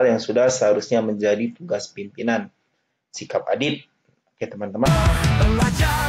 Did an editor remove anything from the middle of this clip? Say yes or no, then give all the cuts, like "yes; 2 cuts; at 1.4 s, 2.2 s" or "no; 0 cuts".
yes; 1 cut; at 4.9 s